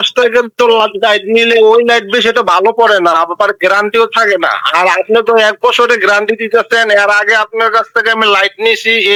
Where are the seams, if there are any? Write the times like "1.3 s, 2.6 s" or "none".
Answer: none